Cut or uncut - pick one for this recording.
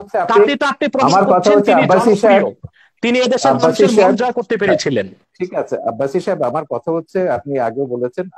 uncut